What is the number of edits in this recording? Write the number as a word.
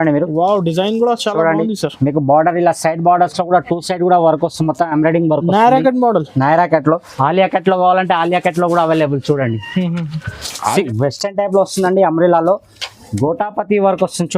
two